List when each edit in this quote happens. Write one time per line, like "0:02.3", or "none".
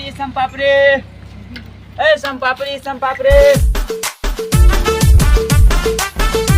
none